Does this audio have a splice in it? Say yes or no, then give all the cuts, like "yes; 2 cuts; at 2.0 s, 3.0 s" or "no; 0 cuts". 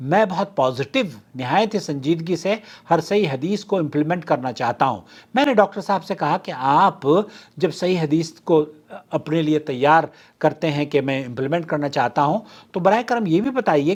no; 0 cuts